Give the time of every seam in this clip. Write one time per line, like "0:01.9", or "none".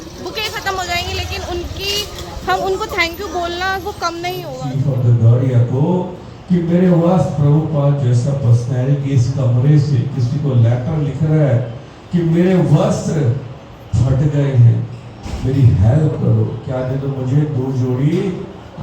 0:04.6

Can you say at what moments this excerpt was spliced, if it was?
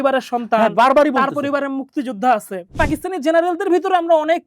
0:02.7

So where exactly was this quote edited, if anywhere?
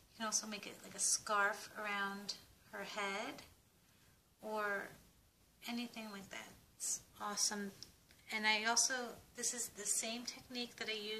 none

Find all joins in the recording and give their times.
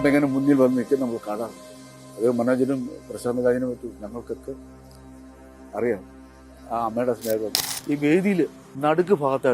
0:07.6
0:08.6

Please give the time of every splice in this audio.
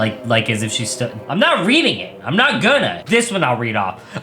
0:01.2
0:03.0

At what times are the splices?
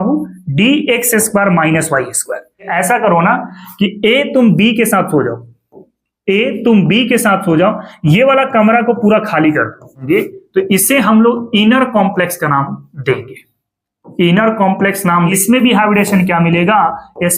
0:02.7
0:10.0
0:15.3

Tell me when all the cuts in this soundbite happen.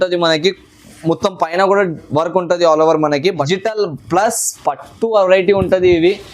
0:03.5

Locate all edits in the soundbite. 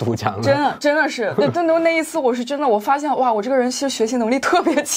none

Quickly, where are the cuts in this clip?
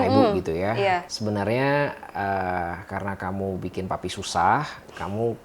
0:01.1

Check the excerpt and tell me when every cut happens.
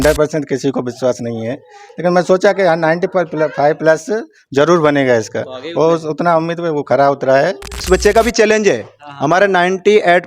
0:07.8

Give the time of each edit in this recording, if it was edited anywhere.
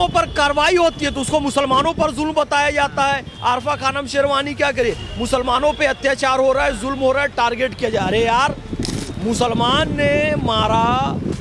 none

